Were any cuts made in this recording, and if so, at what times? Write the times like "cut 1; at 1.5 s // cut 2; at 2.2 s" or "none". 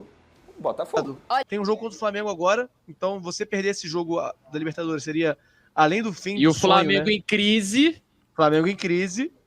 cut 1; at 1.4 s